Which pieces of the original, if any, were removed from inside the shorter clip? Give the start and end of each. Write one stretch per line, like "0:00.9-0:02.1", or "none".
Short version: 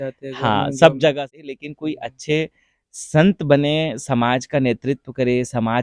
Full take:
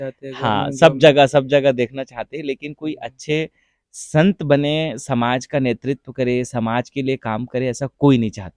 0:01.1-0:02.1